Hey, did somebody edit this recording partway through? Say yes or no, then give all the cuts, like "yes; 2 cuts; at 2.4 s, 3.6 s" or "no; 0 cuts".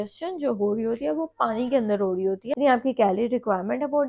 yes; 1 cut; at 2.6 s